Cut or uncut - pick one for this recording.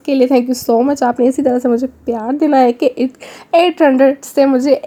uncut